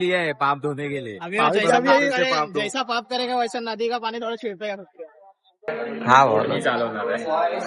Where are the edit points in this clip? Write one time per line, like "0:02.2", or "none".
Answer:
0:05.7